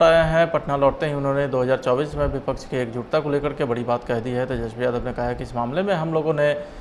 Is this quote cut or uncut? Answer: uncut